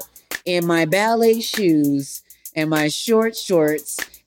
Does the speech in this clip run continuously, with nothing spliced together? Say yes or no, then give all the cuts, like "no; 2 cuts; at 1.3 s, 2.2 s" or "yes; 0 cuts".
yes; 0 cuts